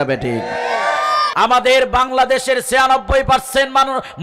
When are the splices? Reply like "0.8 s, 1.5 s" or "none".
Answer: 1.3 s